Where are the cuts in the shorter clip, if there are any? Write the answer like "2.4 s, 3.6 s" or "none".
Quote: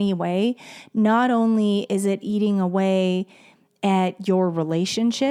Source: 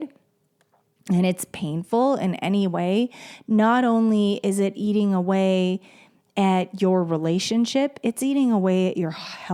none

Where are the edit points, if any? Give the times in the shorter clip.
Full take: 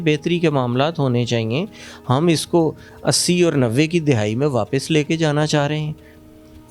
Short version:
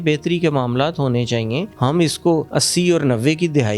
1.7 s, 2.5 s

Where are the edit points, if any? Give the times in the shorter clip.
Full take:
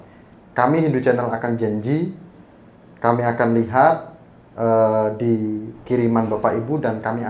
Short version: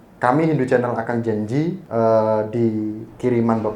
1.8 s

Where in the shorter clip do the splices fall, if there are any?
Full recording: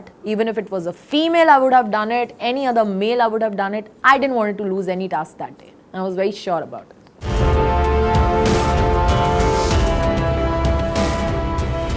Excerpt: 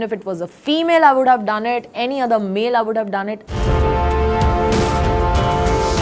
3.4 s

